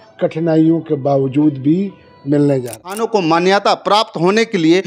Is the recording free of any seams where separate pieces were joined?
no; 1 cut; at 3.0 s

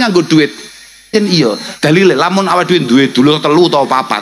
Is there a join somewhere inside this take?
yes; 1 cut; at 1.1 s

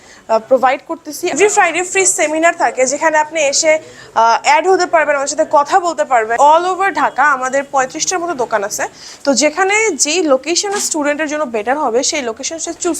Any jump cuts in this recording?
yes; 2 cuts; at 1.3 s, 6.3 s

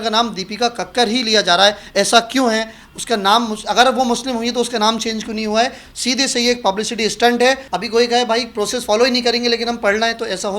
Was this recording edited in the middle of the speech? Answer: yes; 1 cut; at 7.7 s

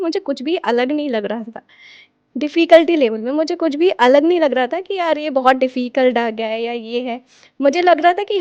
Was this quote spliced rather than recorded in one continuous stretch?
no; 0 cuts

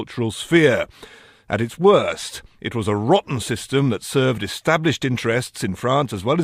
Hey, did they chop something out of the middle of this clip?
yes; 1 cut; at 5.5 s

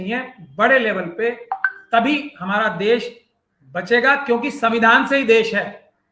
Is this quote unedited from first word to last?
yes; 0 cuts

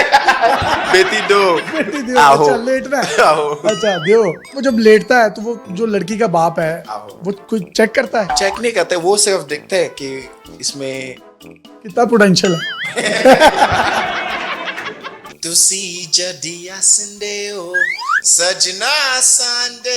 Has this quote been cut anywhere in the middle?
yes; 1 cut; at 15.3 s

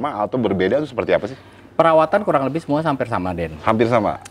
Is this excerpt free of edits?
yes; 0 cuts

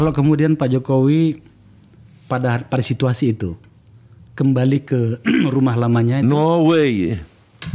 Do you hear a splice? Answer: no; 0 cuts

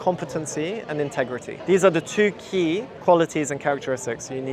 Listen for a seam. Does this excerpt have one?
yes; 1 cut; at 1.5 s

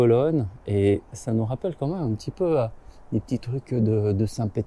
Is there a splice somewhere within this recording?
no; 0 cuts

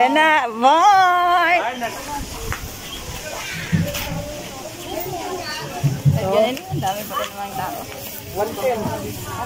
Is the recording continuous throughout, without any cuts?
no; 1 cut; at 1.9 s

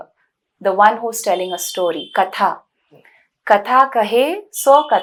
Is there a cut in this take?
no; 0 cuts

